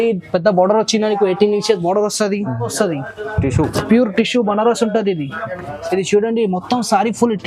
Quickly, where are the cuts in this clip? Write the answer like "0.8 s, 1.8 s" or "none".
2.7 s